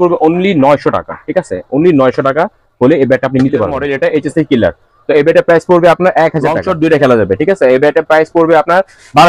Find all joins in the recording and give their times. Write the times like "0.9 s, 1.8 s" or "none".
3.8 s, 6.6 s